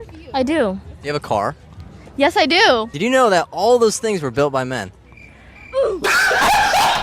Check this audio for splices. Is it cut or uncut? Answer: uncut